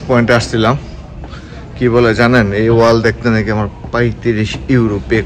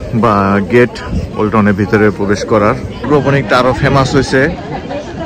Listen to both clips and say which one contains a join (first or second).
second